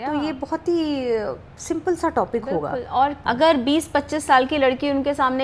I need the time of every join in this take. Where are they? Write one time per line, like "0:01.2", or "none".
0:03.2